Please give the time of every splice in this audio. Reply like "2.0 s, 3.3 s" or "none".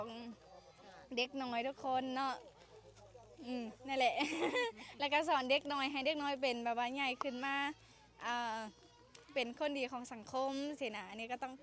none